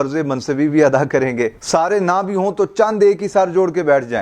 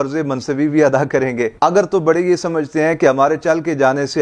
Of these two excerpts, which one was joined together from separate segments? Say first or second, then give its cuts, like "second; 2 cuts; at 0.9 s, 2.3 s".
first; 1 cut; at 1.5 s